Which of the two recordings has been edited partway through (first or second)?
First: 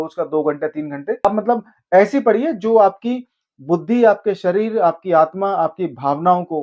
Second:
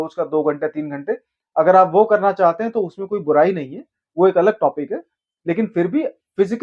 first